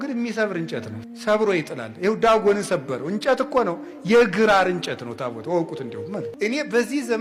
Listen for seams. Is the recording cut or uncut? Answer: uncut